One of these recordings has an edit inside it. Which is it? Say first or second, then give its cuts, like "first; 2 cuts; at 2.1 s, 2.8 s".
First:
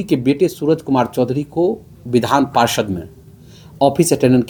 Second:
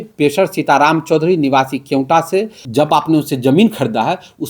second; 1 cut; at 2.6 s